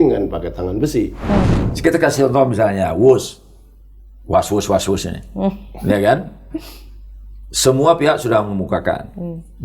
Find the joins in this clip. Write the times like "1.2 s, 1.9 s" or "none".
1.6 s